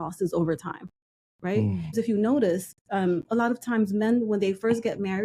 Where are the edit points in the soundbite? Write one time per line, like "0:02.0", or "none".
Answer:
0:01.9